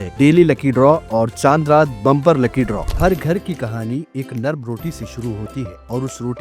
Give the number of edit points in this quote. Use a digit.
1